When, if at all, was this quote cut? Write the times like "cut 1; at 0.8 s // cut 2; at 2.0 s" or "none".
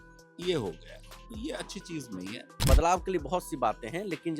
cut 1; at 2.5 s